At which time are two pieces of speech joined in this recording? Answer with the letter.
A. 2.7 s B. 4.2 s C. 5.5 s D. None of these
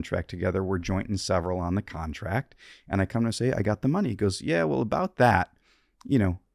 D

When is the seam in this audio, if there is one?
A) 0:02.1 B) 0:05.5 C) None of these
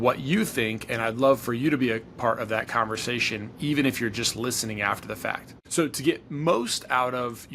B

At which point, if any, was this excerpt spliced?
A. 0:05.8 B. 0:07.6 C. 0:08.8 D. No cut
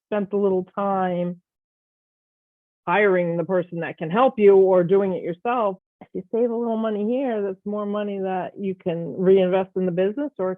A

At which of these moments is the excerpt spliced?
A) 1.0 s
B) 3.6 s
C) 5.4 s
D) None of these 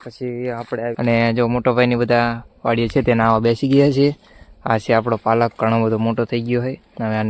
A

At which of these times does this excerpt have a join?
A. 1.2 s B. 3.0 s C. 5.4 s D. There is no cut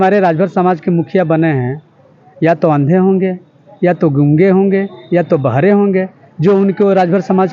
D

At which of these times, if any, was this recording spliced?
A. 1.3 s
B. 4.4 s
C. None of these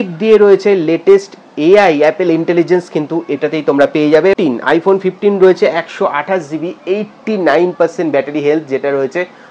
B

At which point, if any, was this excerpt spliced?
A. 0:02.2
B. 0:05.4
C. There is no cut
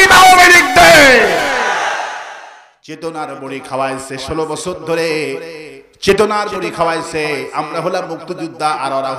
A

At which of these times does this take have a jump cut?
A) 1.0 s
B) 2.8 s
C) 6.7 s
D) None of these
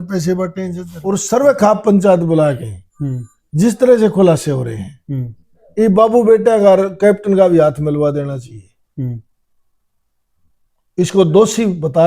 A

